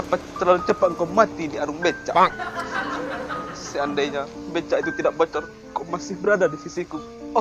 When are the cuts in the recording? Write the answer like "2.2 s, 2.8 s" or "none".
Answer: none

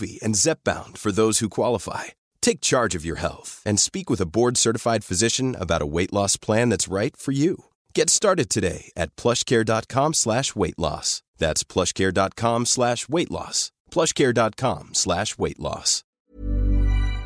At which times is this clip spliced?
16.2 s

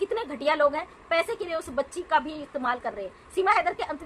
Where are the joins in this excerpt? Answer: none

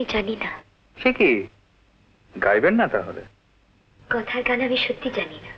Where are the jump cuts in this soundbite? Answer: none

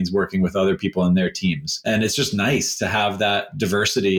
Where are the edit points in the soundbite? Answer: 1.8 s

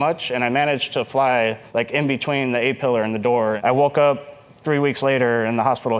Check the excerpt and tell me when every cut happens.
1.6 s, 3.6 s

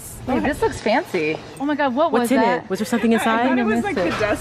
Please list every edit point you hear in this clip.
1.5 s

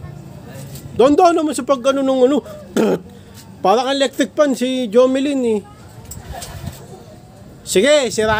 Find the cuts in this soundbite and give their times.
none

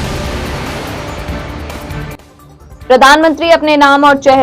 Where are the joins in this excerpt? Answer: 2.3 s

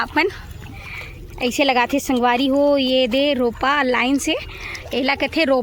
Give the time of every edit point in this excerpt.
none

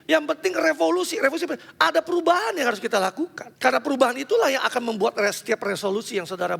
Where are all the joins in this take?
3.4 s

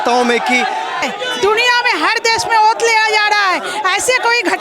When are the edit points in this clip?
1.1 s

